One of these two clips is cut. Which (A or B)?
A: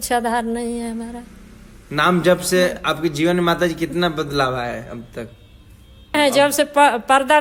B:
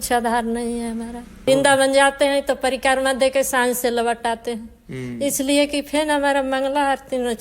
B